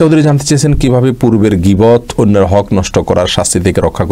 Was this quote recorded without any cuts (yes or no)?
yes